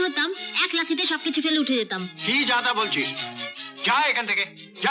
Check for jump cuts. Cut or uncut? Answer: uncut